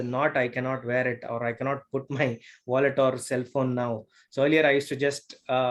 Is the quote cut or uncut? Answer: uncut